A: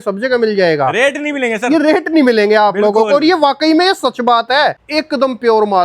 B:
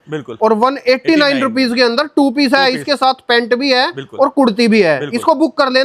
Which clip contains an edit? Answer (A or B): A